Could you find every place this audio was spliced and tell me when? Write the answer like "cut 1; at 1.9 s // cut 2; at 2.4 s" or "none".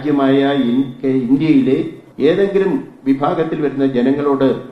cut 1; at 2.0 s